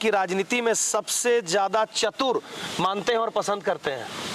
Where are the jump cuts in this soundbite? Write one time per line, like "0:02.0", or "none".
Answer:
none